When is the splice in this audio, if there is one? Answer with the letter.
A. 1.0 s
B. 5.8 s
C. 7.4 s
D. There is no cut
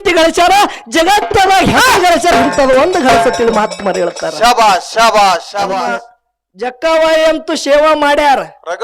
B